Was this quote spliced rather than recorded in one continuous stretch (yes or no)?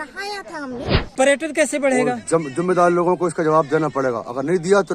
yes